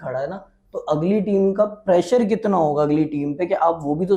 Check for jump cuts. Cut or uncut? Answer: uncut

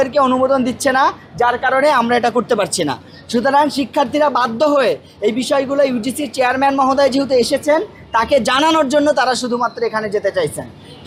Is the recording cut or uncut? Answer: uncut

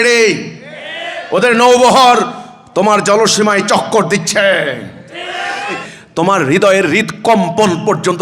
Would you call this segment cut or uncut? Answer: cut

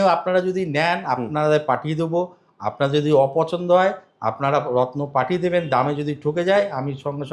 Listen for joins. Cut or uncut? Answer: uncut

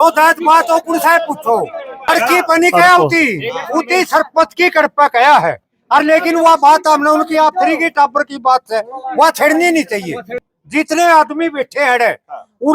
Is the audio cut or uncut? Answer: cut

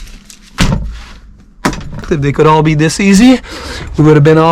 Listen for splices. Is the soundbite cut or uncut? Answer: cut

